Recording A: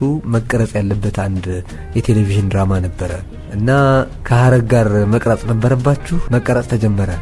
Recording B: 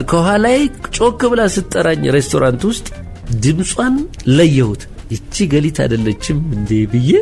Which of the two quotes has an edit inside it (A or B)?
B